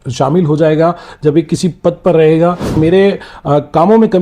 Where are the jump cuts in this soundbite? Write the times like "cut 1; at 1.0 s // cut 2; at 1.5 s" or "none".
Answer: cut 1; at 2.8 s